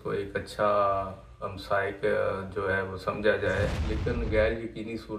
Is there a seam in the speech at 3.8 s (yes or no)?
yes